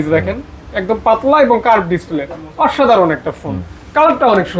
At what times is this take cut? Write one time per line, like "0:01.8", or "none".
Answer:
none